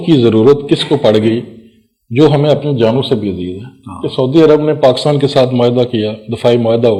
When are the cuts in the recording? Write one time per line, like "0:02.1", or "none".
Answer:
none